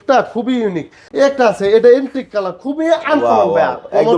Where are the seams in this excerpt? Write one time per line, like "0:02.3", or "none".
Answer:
0:01.0

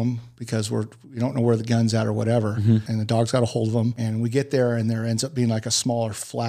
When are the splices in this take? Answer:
0:02.9
0:04.0

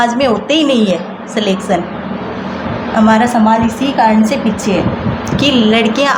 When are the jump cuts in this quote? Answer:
none

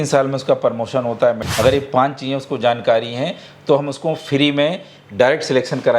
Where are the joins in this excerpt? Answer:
0:01.5

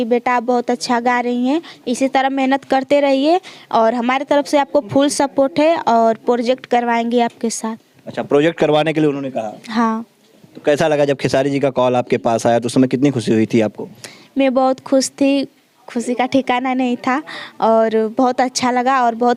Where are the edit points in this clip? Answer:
none

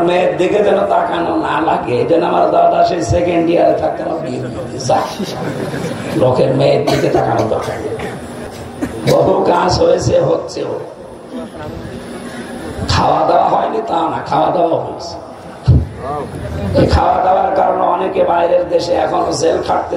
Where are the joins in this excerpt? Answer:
0:08.5

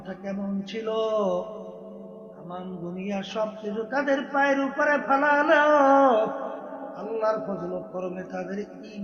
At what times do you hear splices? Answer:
none

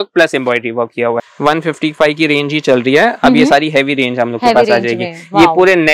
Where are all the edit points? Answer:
0:01.3

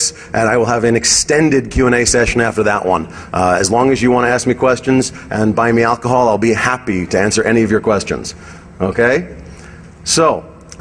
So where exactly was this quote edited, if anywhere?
0:01.5

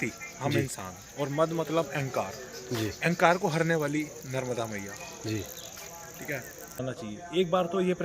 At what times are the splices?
0:06.8

